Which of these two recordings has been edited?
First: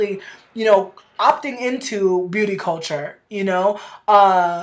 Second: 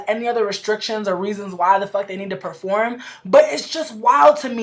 second; 1 cut; at 1.5 s

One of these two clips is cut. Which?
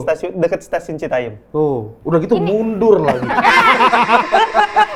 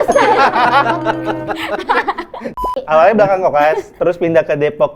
second; 1 cut; at 2.5 s

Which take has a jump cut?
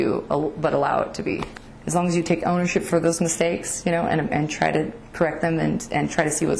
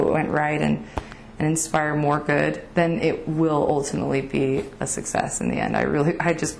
first; 1 cut; at 1.6 s

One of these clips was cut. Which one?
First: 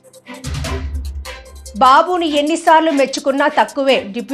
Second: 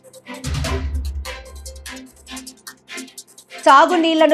first; 1 cut; at 1.5 s

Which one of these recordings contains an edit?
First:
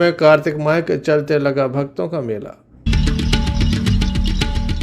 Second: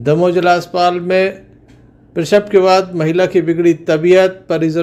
first; 1 cut; at 2.9 s

